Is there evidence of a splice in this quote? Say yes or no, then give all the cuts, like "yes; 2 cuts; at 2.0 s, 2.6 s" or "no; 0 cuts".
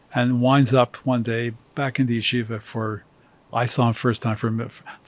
no; 0 cuts